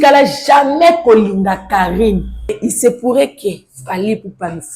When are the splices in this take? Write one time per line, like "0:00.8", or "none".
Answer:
0:02.6